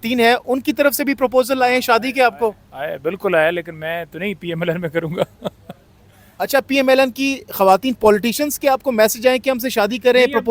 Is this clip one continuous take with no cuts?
yes; 0 cuts

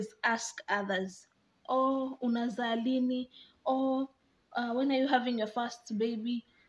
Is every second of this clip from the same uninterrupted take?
yes; 0 cuts

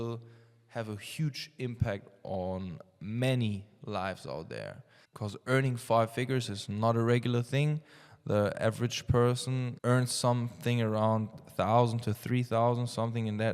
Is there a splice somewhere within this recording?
yes; 1 cut; at 9.7 s

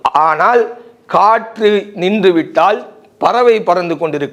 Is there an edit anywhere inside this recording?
no; 0 cuts

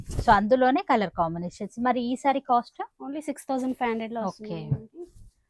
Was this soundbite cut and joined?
no; 0 cuts

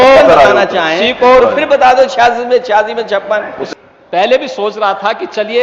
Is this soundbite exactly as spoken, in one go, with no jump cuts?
no; 1 cut; at 3.6 s

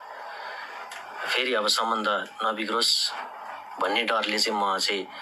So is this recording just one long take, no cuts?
yes; 0 cuts

